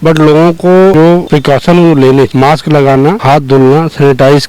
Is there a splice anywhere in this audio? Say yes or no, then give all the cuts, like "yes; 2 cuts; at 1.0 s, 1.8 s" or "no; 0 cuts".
yes; 3 cuts; at 1.1 s, 2.3 s, 3.2 s